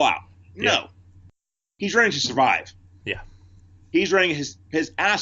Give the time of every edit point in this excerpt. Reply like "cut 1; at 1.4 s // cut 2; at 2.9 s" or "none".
none